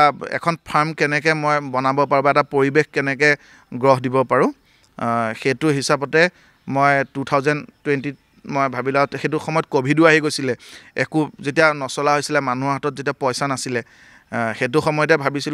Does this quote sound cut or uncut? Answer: uncut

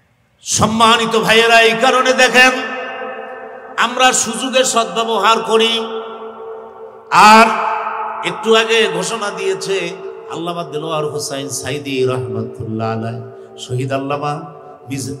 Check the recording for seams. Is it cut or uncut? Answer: uncut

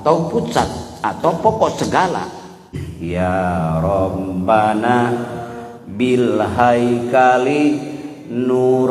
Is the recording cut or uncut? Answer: cut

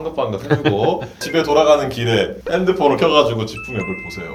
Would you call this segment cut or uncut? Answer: uncut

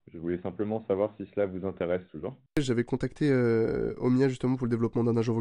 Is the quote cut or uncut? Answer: cut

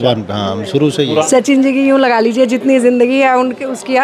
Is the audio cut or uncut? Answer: cut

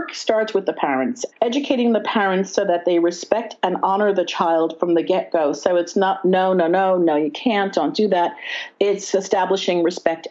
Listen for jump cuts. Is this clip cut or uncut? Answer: cut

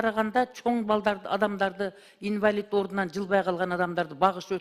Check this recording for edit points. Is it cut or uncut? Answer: uncut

